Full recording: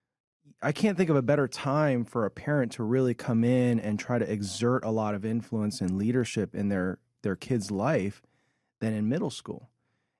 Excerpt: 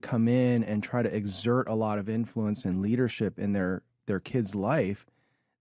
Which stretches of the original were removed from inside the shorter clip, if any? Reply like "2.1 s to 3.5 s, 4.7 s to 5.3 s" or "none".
none